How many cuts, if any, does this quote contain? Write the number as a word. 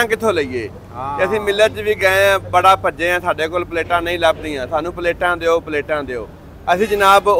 zero